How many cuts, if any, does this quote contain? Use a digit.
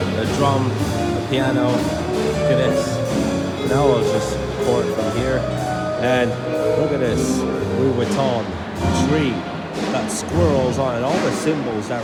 0